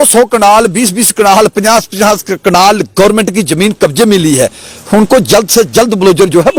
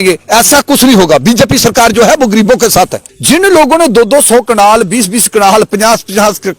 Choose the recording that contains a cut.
second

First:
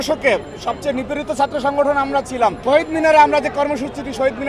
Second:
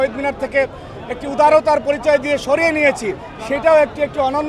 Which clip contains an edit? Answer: first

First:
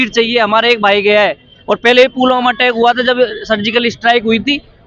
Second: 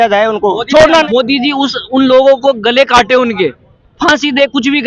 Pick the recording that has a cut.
second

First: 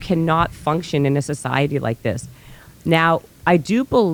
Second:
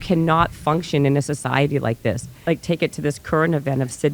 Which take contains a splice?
second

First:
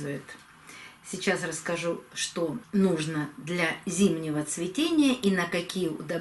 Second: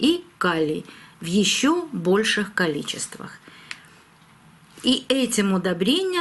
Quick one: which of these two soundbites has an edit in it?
first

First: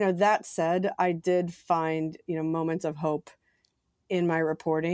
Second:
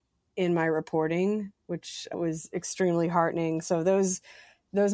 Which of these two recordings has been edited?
second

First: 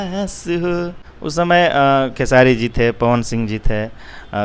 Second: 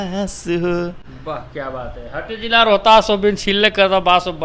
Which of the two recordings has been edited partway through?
first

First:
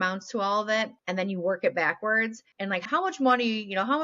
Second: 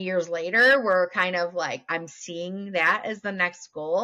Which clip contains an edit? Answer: first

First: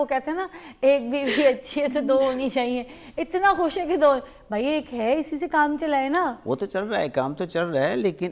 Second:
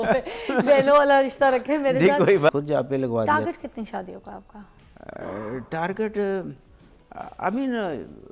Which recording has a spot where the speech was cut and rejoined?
second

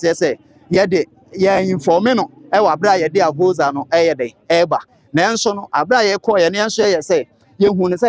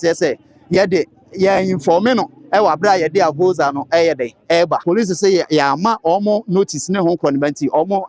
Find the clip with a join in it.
second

